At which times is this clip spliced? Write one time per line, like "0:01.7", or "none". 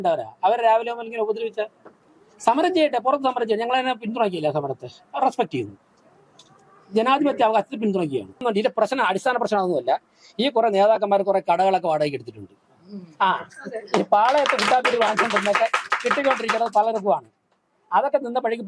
0:08.4